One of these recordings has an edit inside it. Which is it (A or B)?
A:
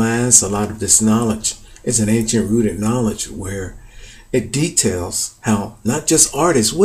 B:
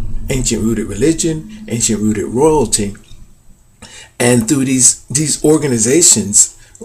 A